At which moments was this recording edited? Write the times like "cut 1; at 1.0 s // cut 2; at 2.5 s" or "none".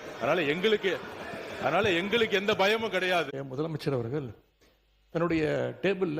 cut 1; at 3.3 s